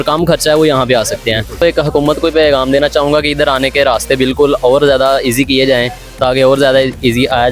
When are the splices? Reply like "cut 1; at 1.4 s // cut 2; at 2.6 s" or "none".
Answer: cut 1; at 1.6 s